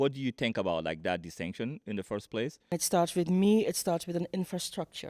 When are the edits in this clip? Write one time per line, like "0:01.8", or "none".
0:02.7